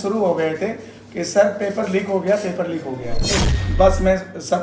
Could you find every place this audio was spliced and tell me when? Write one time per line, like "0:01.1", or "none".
0:03.5